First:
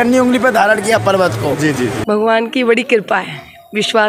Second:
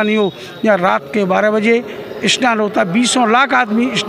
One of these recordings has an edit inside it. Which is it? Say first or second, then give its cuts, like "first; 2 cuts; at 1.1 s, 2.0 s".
first; 1 cut; at 2.0 s